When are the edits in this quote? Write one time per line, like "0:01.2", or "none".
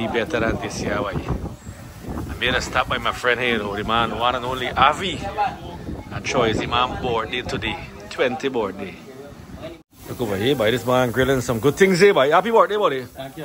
0:09.8